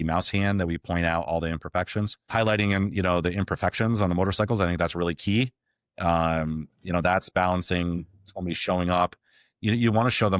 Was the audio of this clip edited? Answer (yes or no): yes